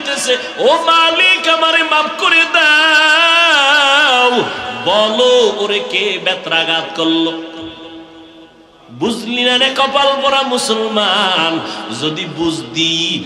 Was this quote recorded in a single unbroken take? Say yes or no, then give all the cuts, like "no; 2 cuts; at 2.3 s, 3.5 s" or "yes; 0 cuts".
yes; 0 cuts